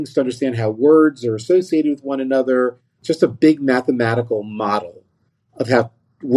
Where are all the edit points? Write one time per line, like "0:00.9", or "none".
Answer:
0:02.9